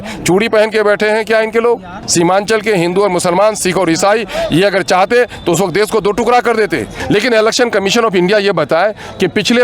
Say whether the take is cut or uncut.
cut